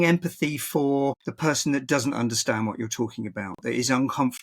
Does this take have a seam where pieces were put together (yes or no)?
yes